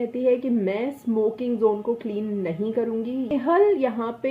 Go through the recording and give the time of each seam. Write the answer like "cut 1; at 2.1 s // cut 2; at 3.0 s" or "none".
cut 1; at 3.3 s